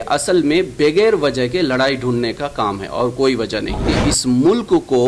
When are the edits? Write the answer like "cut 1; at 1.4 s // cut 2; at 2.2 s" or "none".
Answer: cut 1; at 3.9 s